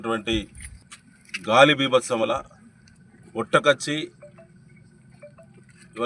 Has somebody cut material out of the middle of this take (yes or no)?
yes